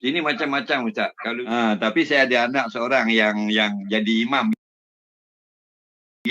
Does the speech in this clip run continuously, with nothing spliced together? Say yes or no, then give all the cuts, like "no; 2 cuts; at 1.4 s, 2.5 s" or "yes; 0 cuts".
no; 1 cut; at 1.3 s